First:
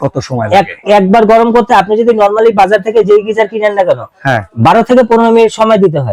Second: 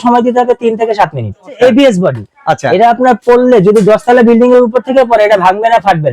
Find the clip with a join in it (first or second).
second